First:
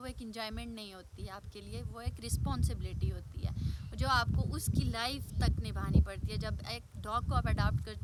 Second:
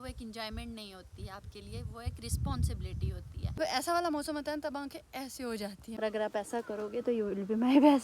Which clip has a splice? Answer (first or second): second